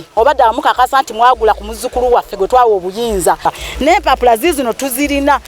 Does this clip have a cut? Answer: yes; 1 cut; at 3.4 s

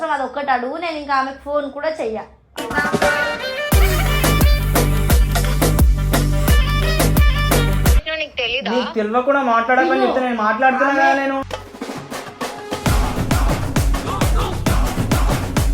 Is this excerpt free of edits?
no; 1 cut; at 8.1 s

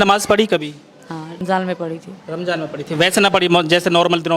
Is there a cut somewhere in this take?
yes; 1 cut; at 1.4 s

